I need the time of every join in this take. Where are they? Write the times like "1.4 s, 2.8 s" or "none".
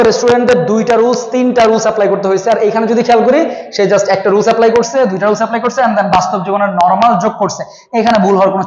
none